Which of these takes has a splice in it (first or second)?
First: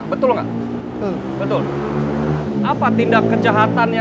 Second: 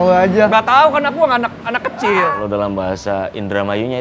second